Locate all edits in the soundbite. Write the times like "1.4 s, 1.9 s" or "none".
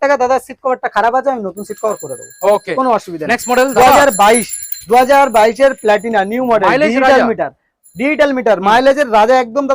none